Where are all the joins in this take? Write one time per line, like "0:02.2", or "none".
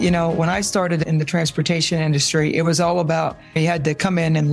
0:01.0
0:03.6